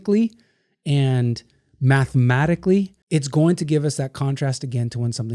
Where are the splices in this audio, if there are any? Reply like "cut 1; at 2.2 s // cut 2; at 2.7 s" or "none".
cut 1; at 3.0 s